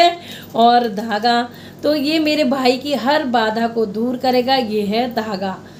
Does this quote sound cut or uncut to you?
uncut